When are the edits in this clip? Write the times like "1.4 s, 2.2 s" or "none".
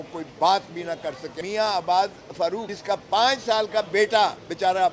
1.3 s, 2.7 s

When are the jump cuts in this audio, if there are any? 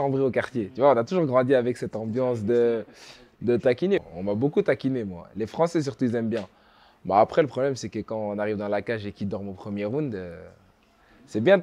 4.0 s

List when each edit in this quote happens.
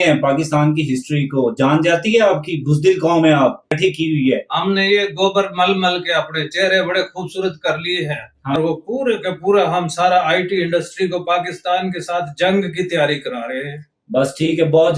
3.7 s, 8.6 s

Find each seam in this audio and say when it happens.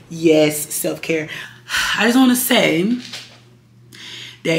1.4 s

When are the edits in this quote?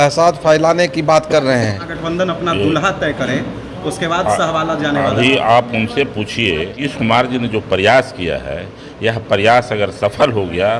1.9 s, 6.8 s

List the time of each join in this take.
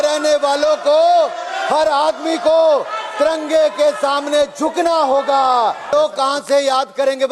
5.9 s

